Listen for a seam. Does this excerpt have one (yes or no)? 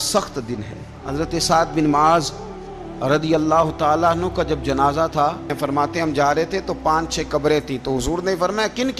yes